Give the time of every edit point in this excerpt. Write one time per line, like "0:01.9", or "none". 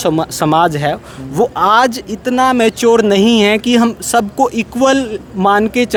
none